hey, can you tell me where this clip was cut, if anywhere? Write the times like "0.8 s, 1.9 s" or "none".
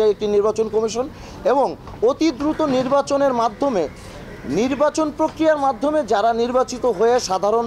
none